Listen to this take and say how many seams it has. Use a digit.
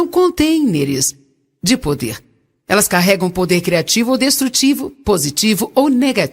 0